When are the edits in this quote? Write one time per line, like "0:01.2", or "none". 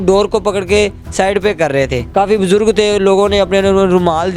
0:02.0

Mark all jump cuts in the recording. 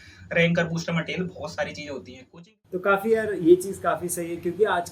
0:02.2

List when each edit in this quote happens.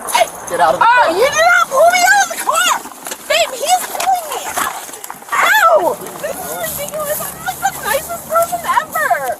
0:06.1

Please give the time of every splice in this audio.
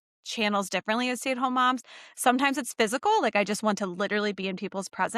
none

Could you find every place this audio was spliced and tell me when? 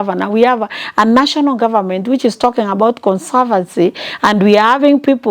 none

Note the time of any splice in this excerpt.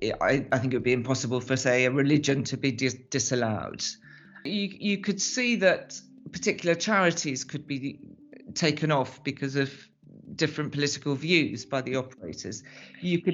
0:04.5

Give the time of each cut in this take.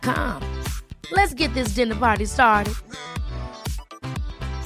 none

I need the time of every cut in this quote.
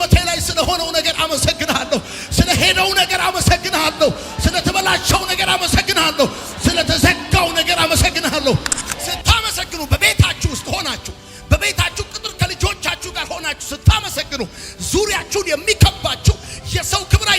0:09.1

